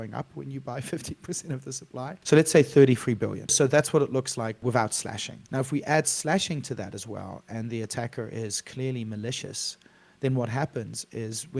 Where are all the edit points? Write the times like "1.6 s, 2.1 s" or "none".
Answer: 2.2 s, 3.5 s, 4.6 s, 5.3 s